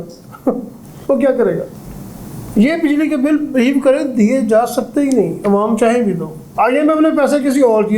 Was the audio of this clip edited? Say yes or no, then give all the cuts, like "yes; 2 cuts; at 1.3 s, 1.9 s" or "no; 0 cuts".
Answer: yes; 2 cuts; at 1.7 s, 6.4 s